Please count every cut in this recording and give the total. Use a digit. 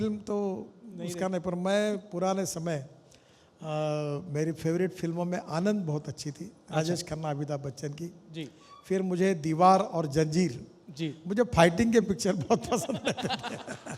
0